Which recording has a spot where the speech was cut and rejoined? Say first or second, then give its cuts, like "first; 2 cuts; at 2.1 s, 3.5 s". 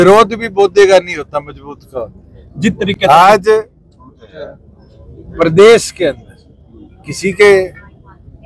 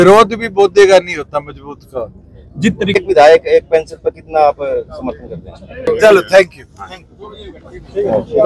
second; 2 cuts; at 2.9 s, 5.9 s